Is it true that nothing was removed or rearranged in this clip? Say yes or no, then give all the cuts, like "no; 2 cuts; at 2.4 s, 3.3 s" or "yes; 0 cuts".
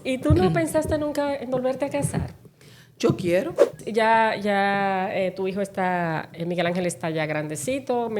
no; 1 cut; at 3.8 s